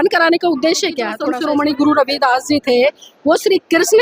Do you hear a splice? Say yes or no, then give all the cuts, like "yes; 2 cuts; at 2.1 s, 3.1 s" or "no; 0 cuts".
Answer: yes; 1 cut; at 1.1 s